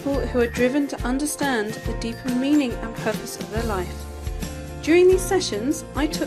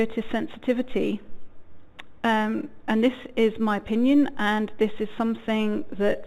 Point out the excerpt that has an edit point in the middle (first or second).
first